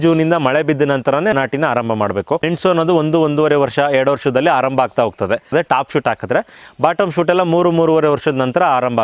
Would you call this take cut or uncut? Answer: cut